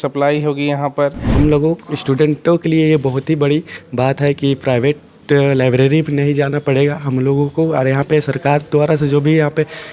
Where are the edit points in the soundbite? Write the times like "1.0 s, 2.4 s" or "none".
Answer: 1.2 s